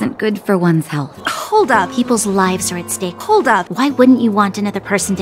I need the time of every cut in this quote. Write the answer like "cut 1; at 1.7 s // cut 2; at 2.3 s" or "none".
cut 1; at 1.2 s